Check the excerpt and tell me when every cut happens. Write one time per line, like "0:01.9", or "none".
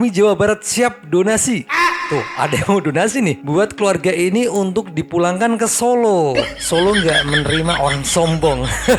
none